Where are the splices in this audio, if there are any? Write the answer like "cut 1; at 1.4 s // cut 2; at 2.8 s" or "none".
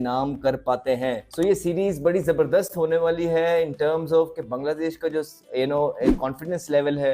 cut 1; at 1.2 s